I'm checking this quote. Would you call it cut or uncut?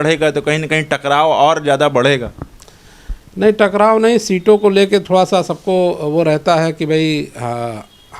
uncut